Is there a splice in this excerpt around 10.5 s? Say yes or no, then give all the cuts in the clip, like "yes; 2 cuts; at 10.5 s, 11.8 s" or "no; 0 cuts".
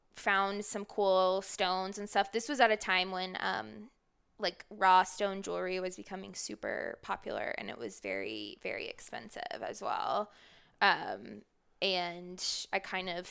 no; 0 cuts